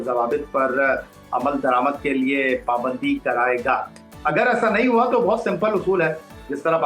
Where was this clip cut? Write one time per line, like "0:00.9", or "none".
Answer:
none